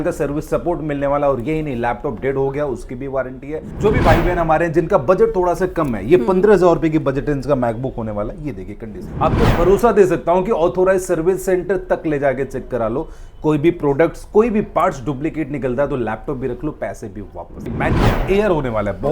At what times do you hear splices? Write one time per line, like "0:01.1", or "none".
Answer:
0:03.6
0:09.0
0:17.8